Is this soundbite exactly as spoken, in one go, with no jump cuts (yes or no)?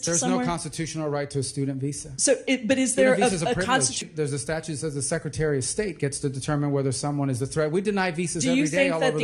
no